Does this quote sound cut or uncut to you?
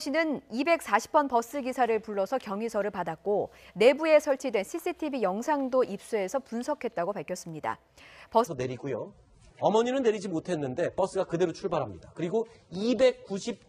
uncut